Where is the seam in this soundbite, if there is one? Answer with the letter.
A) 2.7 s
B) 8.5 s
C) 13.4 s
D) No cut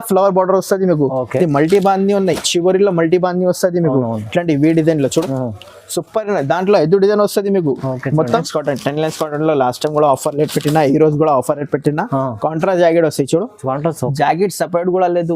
B